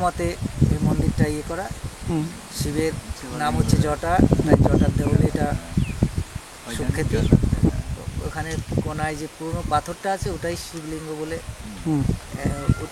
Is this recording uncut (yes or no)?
no